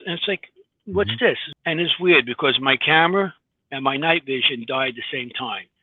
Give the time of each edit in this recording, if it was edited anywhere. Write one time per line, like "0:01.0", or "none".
0:01.5